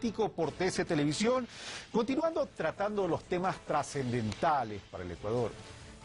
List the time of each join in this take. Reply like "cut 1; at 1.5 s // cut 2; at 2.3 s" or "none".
cut 1; at 2.0 s